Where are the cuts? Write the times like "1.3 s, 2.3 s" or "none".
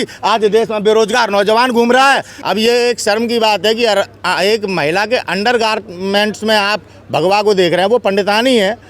2.3 s